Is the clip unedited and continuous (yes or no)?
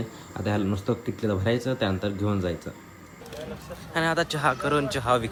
yes